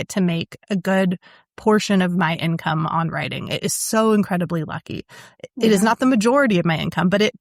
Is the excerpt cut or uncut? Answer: uncut